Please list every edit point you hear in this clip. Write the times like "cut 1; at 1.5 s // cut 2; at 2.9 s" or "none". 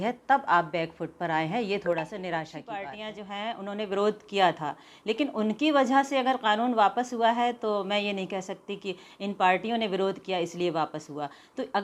cut 1; at 3.0 s